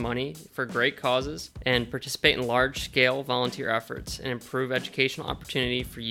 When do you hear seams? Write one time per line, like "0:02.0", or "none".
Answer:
0:01.5